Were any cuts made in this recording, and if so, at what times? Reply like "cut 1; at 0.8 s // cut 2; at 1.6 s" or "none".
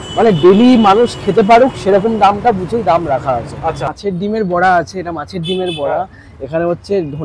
cut 1; at 3.9 s